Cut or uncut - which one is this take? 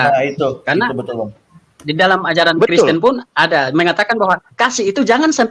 uncut